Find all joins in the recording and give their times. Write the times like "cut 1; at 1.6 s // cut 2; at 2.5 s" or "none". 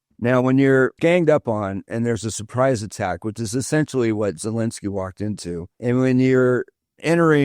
cut 1; at 5.7 s

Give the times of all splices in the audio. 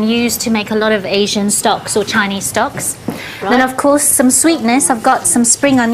cut 1; at 1.2 s

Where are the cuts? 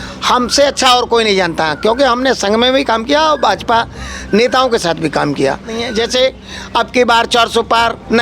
cut 1; at 5.8 s

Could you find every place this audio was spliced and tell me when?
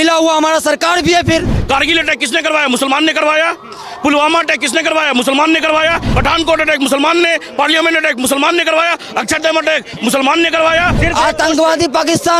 cut 1; at 1.5 s // cut 2; at 6.1 s // cut 3; at 11.0 s

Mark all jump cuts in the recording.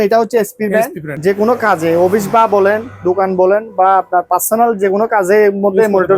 cut 1; at 1.1 s

